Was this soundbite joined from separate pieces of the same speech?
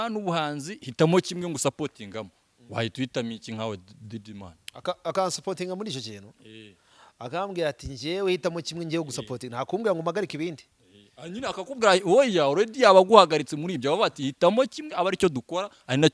no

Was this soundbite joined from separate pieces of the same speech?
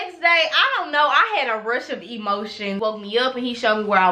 yes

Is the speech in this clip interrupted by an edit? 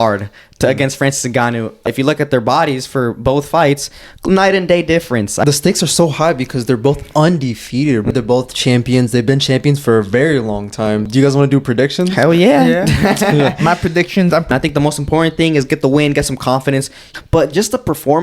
yes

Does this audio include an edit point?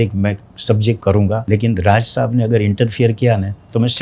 yes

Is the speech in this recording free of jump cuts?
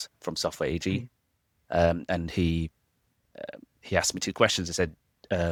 yes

